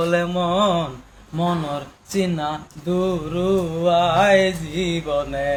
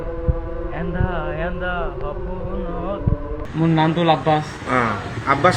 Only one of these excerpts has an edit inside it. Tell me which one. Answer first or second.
second